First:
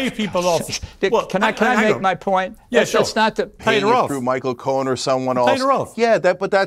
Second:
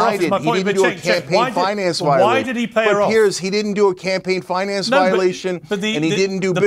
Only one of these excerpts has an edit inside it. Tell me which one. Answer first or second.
first